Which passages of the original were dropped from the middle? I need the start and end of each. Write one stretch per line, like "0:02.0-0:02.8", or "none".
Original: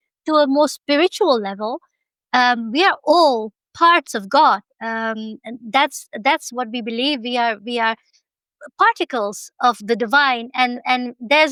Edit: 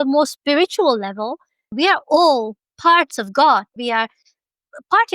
0:02.1-0:02.7
0:04.7-0:07.6